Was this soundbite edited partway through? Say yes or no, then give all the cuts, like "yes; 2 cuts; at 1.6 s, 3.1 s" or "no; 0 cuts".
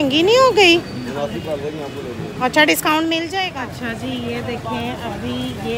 yes; 1 cut; at 3.5 s